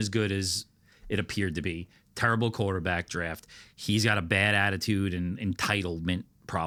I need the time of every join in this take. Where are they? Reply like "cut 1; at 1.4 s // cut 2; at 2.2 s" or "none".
none